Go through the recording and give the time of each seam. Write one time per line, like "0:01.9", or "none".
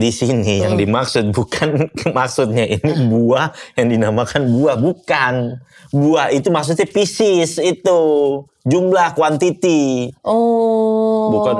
none

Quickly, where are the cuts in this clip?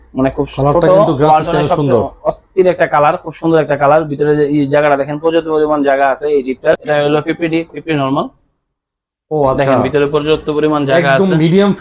0:06.8

